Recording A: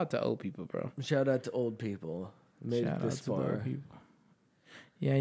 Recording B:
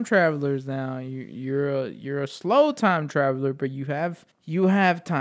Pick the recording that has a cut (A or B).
B